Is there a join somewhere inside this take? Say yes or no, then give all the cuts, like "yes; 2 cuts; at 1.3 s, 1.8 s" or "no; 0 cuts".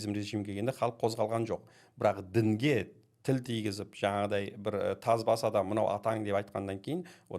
no; 0 cuts